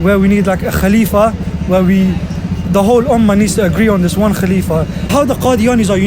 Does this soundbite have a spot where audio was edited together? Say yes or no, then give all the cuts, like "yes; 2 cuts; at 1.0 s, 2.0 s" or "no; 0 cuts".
yes; 1 cut; at 5.1 s